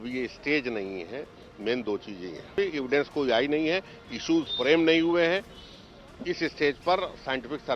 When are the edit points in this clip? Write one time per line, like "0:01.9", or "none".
0:02.6